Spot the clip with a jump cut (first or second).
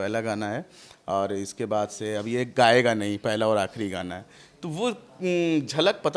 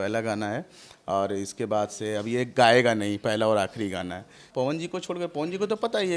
second